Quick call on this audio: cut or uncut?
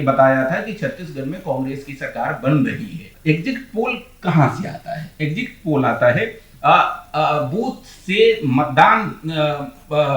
cut